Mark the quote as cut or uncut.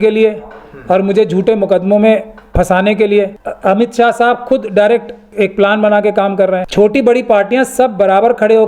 cut